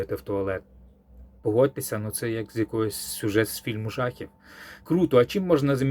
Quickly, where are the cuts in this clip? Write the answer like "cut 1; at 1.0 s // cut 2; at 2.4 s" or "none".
cut 1; at 1.4 s // cut 2; at 4.7 s